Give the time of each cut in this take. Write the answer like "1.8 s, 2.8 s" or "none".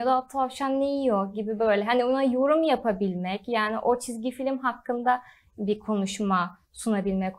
none